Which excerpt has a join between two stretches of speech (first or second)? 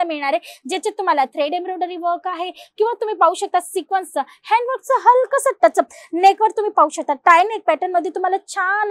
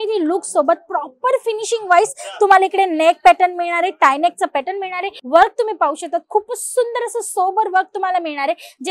second